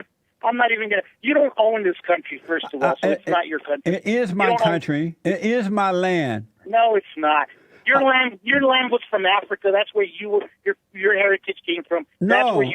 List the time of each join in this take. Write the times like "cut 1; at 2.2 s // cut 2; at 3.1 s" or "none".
cut 1; at 5.3 s